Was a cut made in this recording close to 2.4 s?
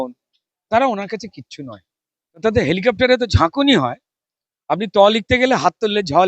yes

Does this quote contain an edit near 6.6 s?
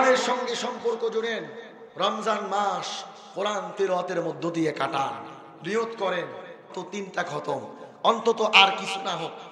yes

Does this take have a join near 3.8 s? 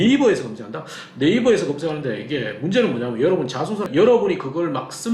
yes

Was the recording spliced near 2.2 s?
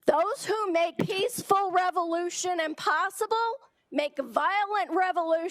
no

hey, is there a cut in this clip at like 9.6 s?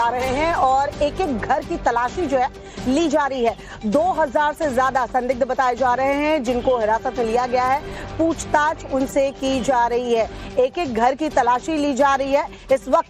yes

